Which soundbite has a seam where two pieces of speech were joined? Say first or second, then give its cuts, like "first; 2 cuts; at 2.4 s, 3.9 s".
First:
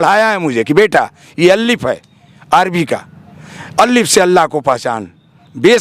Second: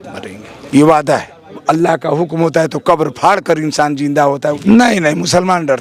second; 2 cuts; at 1.6 s, 4.6 s